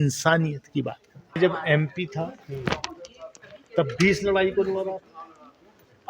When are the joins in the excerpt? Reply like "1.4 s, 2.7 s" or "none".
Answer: 1.4 s